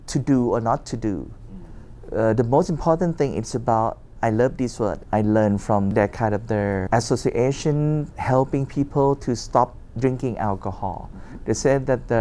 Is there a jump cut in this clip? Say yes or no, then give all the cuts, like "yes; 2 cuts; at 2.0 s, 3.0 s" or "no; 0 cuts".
no; 0 cuts